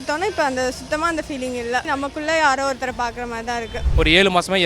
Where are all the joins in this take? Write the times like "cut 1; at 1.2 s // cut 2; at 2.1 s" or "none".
cut 1; at 1.8 s // cut 2; at 3.8 s